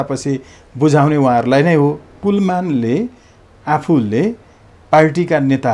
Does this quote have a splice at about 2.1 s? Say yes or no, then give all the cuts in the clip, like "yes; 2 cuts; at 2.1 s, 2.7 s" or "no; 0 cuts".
yes; 1 cut; at 2.1 s